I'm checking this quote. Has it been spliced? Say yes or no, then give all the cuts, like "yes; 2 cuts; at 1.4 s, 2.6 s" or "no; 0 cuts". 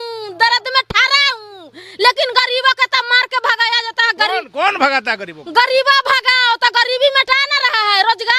no; 0 cuts